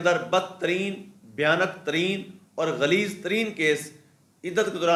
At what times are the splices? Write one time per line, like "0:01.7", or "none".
none